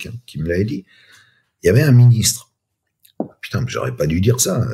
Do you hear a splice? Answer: no; 0 cuts

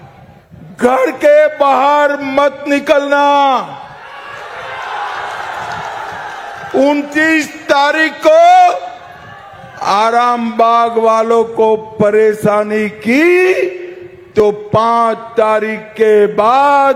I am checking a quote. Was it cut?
no; 0 cuts

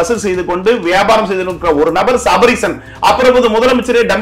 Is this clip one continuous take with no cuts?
yes; 0 cuts

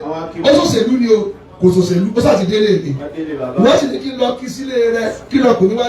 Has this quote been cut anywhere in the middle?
no; 0 cuts

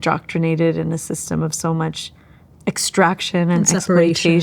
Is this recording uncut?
yes; 0 cuts

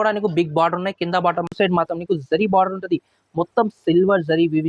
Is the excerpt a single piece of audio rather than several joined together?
no; 1 cut; at 1.5 s

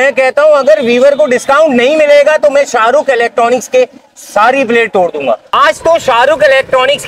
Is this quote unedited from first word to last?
no; 1 cut; at 5.5 s

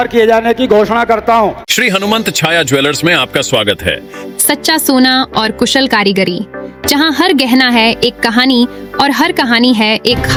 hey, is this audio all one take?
yes; 0 cuts

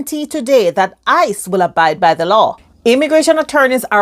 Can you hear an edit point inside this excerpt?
yes; 1 cut; at 2.7 s

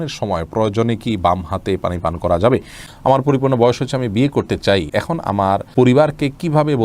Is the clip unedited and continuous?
no; 2 cuts; at 2.8 s, 5.3 s

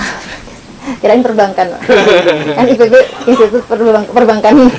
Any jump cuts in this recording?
no; 0 cuts

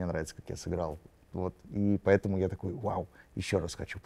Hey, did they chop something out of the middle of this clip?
no; 0 cuts

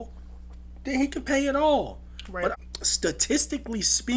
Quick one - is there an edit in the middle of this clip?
yes; 1 cut; at 2.5 s

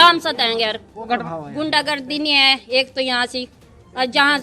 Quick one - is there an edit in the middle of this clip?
yes; 1 cut; at 1.1 s

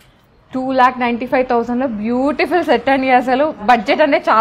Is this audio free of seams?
yes; 0 cuts

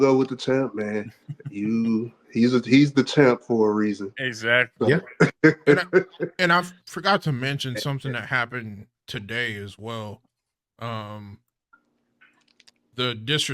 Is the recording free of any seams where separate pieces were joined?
yes; 0 cuts

